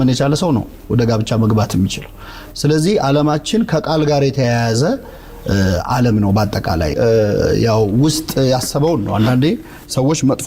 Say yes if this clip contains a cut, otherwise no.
no